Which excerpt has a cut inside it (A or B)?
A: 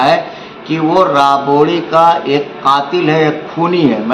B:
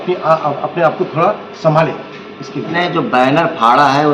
B